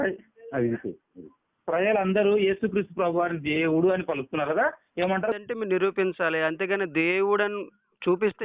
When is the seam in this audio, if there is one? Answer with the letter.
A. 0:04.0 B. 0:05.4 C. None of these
B